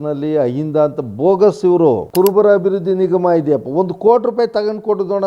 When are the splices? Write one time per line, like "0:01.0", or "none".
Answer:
0:02.1